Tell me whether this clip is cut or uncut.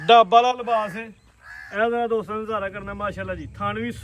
uncut